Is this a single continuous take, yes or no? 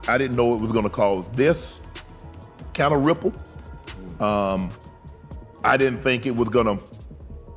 yes